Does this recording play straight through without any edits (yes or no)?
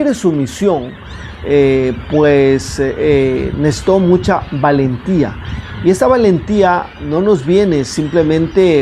yes